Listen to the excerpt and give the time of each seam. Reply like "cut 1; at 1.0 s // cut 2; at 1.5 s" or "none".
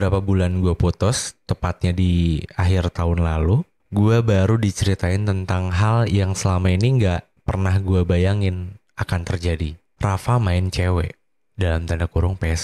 cut 1; at 3.8 s // cut 2; at 9.8 s